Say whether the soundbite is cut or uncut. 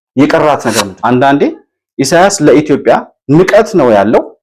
cut